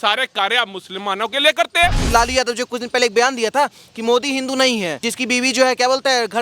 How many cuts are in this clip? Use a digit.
2